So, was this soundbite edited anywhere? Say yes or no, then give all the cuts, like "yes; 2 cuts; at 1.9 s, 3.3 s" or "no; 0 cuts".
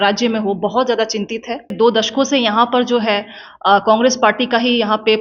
yes; 1 cut; at 1.7 s